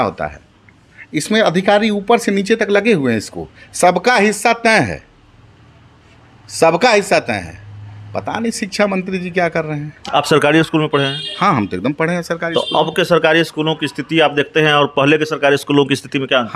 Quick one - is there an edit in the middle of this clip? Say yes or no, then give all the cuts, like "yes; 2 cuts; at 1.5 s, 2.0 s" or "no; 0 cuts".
no; 0 cuts